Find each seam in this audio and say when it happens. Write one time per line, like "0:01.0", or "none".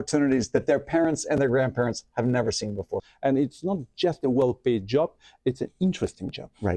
0:03.1